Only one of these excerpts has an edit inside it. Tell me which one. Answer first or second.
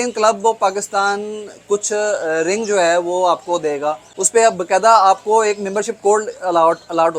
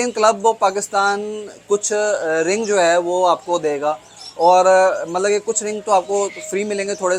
first